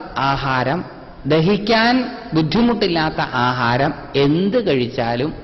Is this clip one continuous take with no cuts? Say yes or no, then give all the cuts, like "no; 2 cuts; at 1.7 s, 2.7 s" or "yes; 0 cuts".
yes; 0 cuts